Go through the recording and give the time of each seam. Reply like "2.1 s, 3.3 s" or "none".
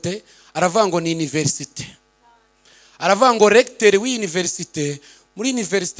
none